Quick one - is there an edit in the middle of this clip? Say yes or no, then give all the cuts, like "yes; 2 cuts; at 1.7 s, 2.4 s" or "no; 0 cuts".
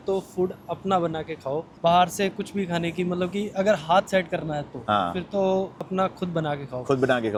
no; 0 cuts